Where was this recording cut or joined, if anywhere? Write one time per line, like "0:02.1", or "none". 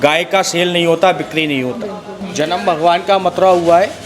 0:02.3